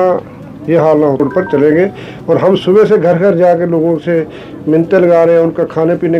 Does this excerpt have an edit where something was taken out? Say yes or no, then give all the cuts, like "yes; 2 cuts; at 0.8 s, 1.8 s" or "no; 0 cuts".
yes; 1 cut; at 1.2 s